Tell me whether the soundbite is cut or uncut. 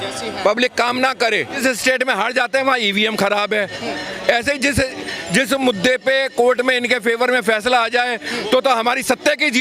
cut